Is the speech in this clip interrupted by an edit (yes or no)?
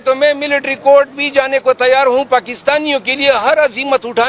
no